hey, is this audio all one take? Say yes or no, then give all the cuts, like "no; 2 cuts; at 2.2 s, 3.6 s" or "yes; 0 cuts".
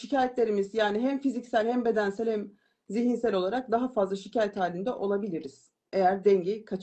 yes; 0 cuts